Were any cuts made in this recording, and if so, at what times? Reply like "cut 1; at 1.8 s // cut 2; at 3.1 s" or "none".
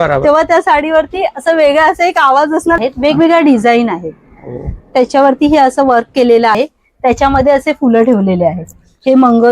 cut 1; at 2.8 s // cut 2; at 6.6 s